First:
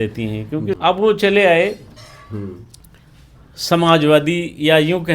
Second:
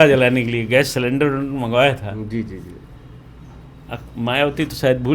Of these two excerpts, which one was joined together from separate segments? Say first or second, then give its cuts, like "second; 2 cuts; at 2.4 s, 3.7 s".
first; 1 cut; at 0.9 s